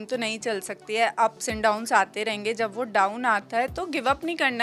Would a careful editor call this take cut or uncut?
uncut